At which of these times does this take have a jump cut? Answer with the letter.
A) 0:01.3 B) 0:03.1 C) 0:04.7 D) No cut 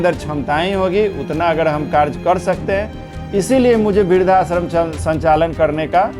D